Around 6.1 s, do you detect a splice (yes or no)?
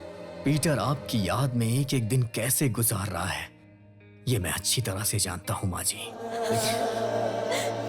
yes